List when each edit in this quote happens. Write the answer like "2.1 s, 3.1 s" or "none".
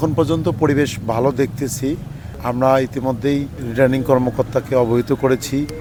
none